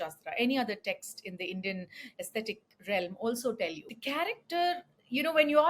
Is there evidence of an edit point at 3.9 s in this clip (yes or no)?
yes